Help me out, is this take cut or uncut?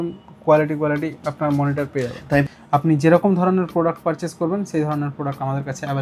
cut